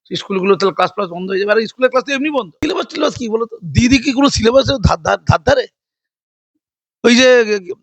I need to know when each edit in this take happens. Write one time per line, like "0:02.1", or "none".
0:02.6